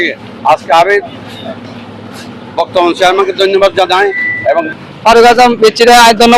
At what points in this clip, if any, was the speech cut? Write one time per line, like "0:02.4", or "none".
0:04.7

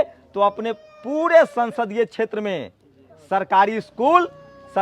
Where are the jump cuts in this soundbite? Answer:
none

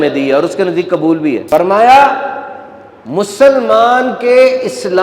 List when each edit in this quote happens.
0:01.4

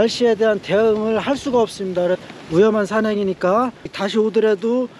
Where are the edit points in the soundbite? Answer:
0:02.2
0:04.0

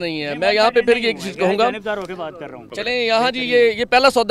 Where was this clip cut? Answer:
0:02.6

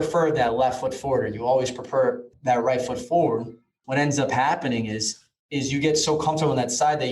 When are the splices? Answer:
0:02.3

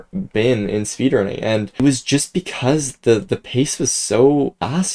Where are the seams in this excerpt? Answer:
none

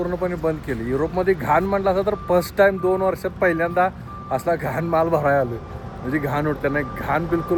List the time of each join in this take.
none

